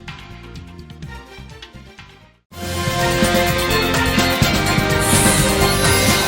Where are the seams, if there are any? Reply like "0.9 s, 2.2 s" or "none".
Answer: 5.0 s